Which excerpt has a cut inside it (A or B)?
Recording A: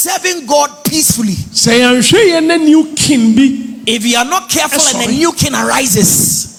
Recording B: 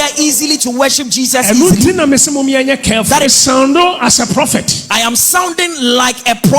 B